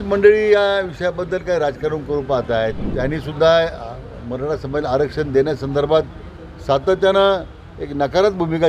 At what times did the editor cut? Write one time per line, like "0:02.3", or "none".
0:02.8